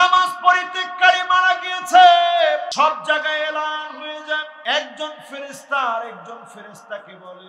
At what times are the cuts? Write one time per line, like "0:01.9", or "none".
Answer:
0:02.7
0:04.5